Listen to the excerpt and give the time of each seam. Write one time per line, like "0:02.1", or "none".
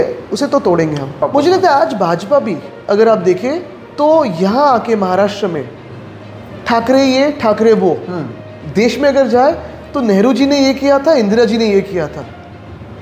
0:01.1